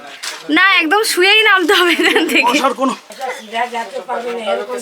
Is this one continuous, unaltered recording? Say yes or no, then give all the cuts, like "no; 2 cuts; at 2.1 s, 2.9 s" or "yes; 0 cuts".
no; 1 cut; at 3.1 s